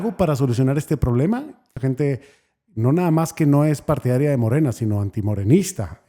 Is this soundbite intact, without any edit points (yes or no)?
no